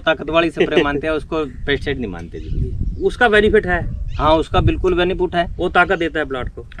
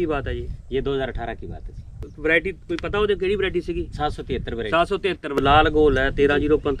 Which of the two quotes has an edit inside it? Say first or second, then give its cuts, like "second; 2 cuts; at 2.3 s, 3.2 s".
second; 2 cuts; at 2.1 s, 5.4 s